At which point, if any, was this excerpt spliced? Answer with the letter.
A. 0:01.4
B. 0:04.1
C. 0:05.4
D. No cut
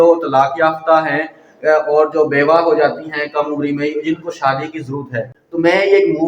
C